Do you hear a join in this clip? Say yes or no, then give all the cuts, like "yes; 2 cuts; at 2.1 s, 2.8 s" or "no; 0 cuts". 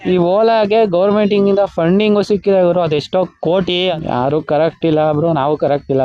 yes; 1 cut; at 3.9 s